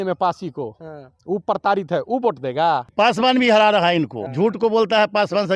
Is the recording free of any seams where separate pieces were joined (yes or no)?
no